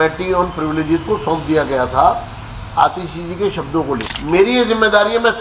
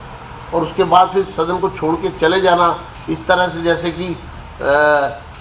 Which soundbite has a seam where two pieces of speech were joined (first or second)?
first